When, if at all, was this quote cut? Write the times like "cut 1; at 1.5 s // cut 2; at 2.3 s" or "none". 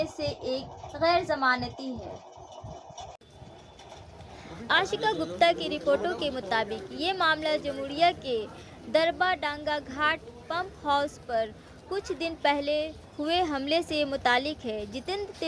none

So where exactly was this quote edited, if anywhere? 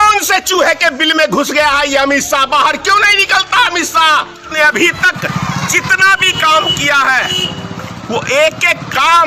cut 1; at 4.5 s

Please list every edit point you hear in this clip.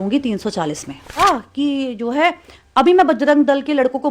cut 1; at 1.2 s

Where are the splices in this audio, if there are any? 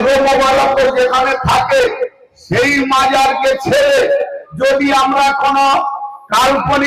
none

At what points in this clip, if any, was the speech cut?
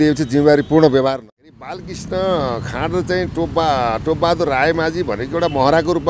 cut 1; at 1.2 s

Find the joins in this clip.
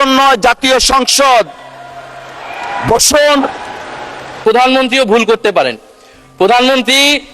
cut 1; at 4.4 s

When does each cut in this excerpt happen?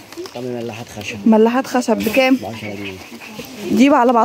none

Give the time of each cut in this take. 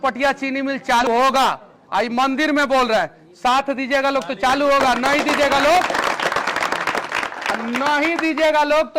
cut 1; at 1.0 s

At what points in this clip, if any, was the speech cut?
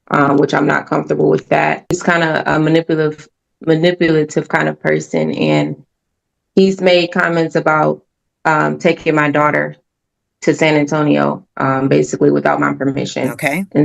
cut 1; at 2.0 s

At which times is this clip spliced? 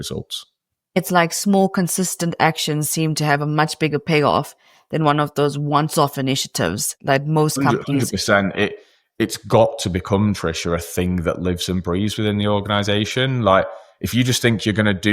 cut 1; at 1.0 s

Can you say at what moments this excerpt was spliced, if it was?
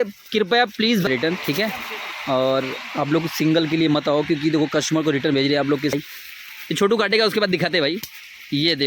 cut 1; at 1.1 s // cut 2; at 5.9 s

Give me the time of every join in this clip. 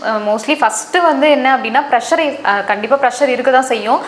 none

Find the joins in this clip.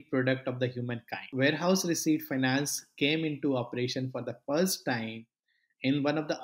cut 1; at 1.3 s

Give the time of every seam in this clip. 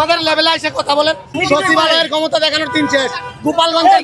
cut 1; at 1.3 s

